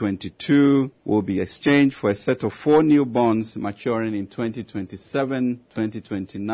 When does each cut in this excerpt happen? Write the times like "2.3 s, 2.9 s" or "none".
1.0 s, 5.7 s